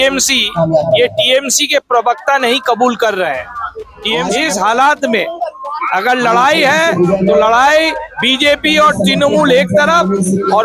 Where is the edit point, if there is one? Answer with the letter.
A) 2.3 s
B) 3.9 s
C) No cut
B